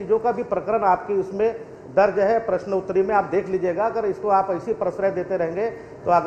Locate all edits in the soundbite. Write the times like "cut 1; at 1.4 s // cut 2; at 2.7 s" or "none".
none